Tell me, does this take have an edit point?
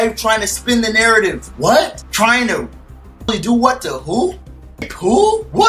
no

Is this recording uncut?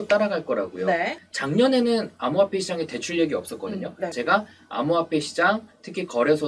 no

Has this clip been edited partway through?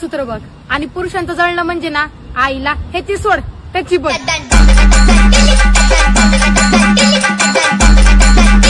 no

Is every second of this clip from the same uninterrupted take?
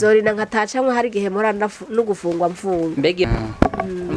no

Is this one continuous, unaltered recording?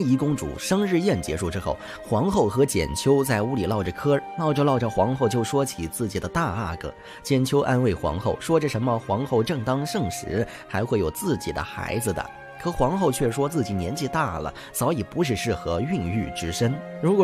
yes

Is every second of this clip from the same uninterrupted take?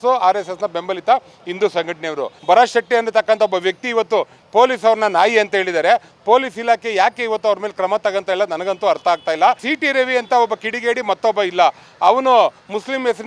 no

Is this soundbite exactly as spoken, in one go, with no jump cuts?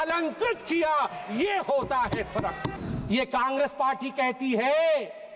no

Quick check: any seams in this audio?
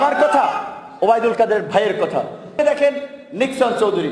yes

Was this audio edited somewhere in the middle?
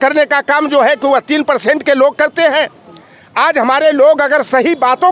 no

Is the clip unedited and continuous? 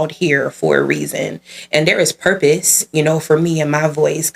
yes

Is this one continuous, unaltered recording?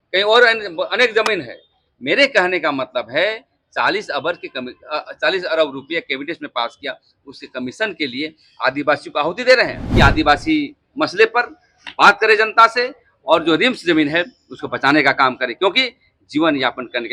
no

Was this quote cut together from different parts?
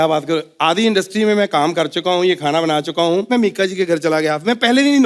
yes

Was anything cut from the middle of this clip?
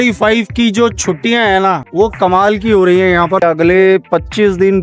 yes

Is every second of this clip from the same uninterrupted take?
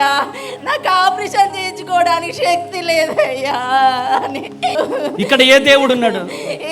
no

